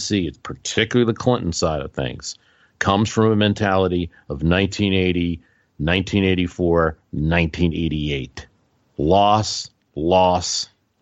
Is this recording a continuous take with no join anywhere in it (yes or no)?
yes